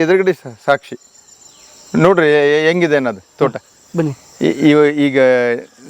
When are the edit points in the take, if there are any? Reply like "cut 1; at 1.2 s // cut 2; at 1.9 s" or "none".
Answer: none

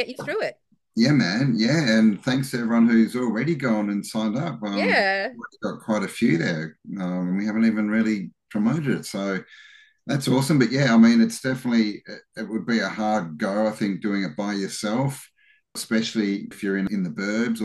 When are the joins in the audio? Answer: cut 1; at 15.8 s // cut 2; at 16.8 s

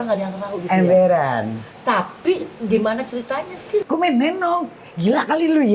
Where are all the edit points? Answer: cut 1; at 3.8 s

